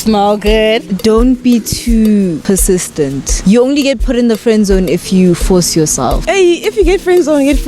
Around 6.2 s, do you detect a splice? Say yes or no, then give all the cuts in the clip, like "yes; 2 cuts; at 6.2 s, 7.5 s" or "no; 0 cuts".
yes; 3 cuts; at 0.9 s, 2.8 s, 6.2 s